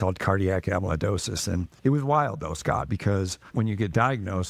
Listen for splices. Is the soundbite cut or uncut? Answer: cut